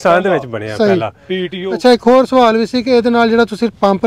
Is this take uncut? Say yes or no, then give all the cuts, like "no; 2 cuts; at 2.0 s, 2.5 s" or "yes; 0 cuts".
no; 1 cut; at 1.7 s